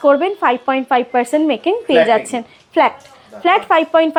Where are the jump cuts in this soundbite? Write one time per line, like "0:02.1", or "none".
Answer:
none